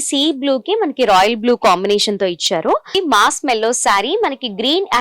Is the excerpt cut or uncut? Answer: cut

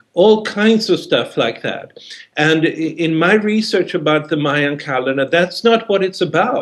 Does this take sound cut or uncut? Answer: cut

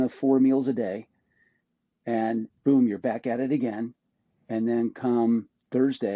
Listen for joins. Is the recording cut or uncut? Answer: uncut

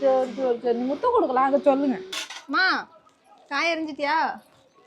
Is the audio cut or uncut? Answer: cut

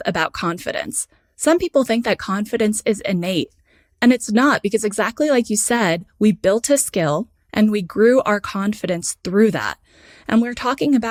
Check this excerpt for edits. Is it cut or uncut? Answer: uncut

